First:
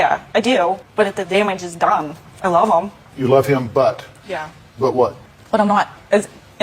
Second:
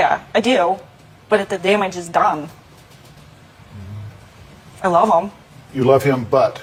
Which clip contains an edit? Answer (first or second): first